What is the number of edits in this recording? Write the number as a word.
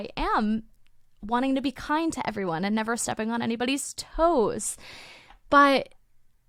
zero